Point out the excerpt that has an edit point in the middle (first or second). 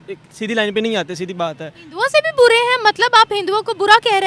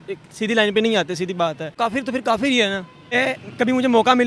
second